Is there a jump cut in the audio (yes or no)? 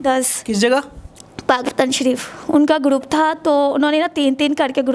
no